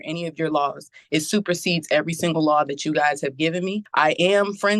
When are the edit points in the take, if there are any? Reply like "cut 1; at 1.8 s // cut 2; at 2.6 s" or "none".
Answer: cut 1; at 3.8 s